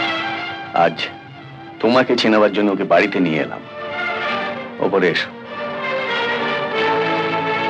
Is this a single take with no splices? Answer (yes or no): yes